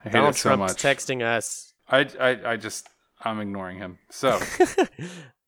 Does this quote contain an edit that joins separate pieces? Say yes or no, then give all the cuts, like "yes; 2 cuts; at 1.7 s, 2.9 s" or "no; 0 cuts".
yes; 1 cut; at 1.7 s